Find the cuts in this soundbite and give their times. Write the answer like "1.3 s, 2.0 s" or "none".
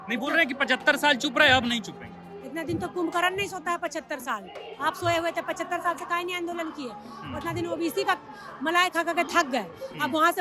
none